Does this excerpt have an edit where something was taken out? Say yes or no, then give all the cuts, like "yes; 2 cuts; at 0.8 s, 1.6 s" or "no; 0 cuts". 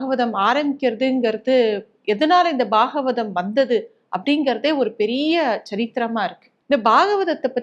no; 0 cuts